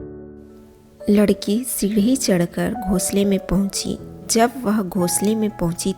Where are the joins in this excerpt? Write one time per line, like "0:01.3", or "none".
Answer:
0:01.1